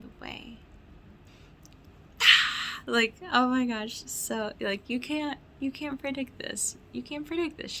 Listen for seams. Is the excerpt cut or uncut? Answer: cut